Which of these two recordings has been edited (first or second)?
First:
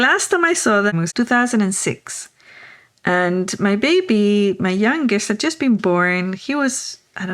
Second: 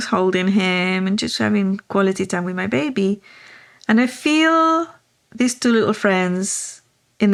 first